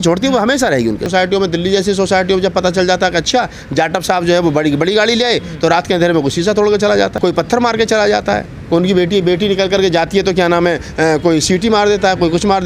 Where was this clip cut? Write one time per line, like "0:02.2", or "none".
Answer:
0:01.1
0:07.1